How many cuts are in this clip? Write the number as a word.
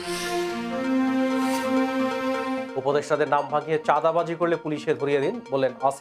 one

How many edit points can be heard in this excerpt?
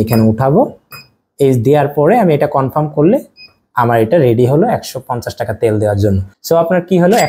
one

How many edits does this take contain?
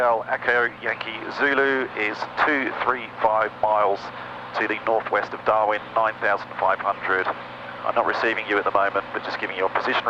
zero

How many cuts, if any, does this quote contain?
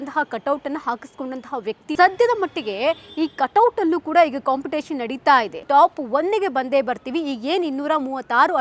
two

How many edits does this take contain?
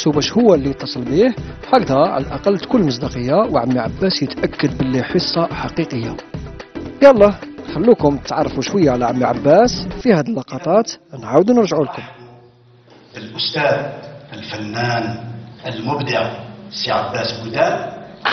one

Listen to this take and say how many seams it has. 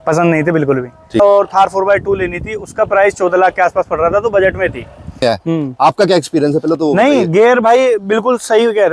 two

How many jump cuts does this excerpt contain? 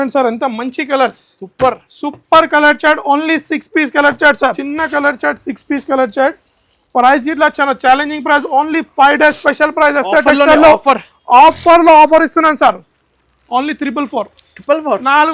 one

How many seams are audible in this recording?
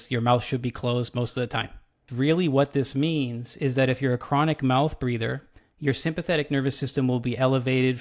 one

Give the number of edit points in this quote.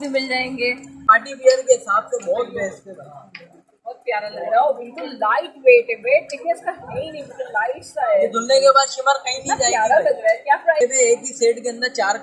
two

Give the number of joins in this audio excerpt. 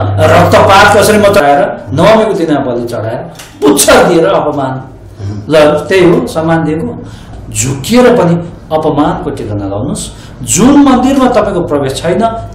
two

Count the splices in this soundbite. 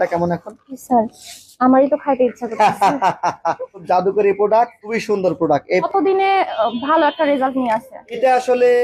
one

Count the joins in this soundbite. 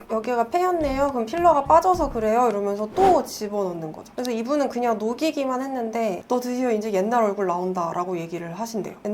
two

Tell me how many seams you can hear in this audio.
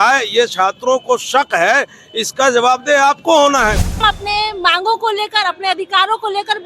one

